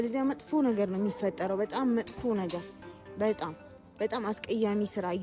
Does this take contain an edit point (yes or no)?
no